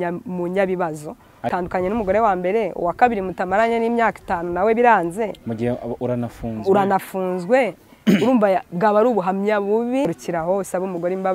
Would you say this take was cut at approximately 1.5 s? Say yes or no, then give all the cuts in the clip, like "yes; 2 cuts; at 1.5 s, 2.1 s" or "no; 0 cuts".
yes; 2 cuts; at 1.5 s, 10.0 s